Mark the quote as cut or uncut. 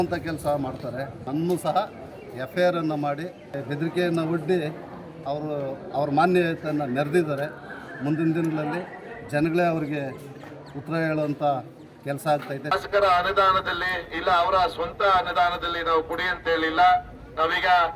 cut